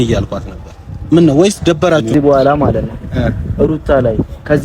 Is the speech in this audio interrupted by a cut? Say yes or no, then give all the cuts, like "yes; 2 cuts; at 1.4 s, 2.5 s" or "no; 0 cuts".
yes; 1 cut; at 2.1 s